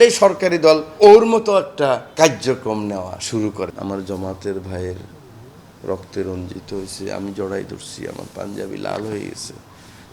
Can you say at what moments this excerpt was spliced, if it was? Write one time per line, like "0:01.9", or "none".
0:00.9
0:02.1
0:03.7